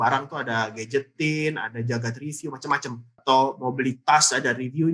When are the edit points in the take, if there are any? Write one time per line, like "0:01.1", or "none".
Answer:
none